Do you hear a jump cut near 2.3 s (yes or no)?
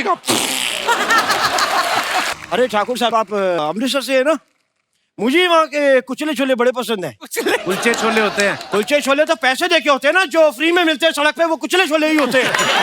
yes